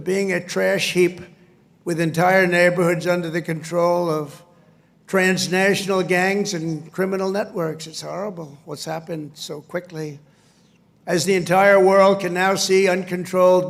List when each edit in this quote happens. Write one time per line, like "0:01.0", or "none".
none